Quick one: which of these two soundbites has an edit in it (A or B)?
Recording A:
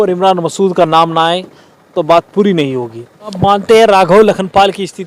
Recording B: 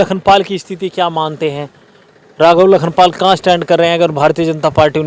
A